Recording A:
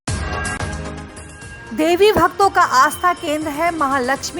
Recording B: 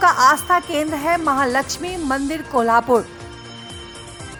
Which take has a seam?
A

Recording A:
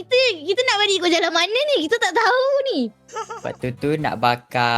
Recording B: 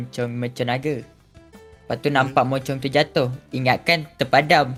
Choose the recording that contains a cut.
A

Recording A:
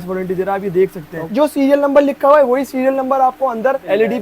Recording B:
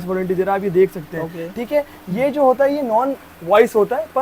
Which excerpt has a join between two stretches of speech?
A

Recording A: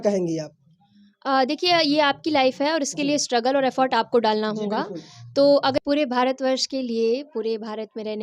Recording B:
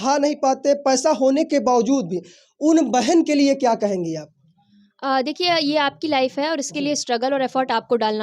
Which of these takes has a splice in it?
A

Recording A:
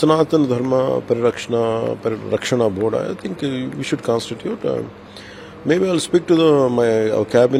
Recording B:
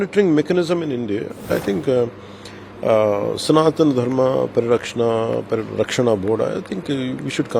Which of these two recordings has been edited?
B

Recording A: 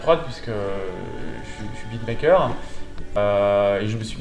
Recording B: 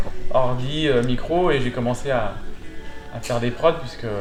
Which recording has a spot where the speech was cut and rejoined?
A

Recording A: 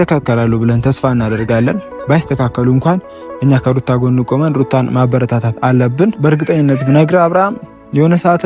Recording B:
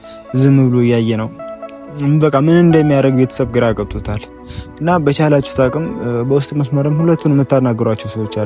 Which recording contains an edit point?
A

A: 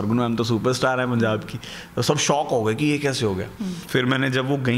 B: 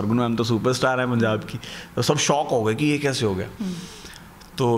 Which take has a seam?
A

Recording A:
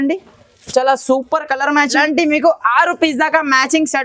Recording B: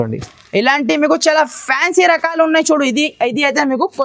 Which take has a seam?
A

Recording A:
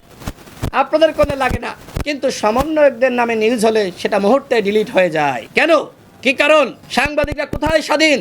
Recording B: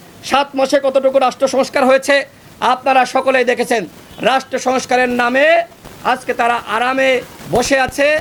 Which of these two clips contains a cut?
A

